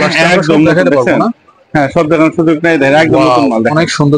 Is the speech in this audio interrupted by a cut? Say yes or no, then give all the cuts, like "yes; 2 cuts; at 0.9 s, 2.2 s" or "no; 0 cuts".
no; 0 cuts